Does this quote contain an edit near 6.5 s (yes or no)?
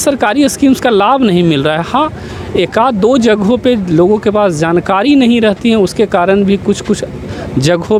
no